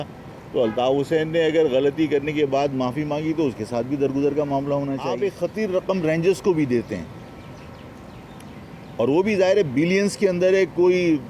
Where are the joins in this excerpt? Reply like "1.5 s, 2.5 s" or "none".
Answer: 5.1 s